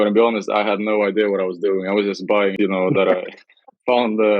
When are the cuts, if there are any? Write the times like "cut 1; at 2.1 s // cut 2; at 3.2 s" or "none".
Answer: cut 1; at 2.5 s